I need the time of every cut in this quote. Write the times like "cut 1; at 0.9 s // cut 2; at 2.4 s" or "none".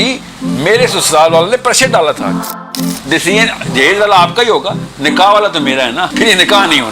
cut 1; at 2.7 s // cut 2; at 6.1 s